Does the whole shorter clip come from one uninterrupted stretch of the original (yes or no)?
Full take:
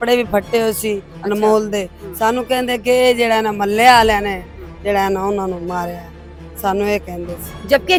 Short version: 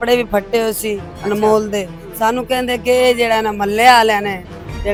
yes